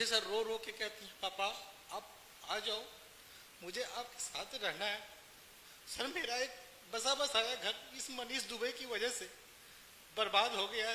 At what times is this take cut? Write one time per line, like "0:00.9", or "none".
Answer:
none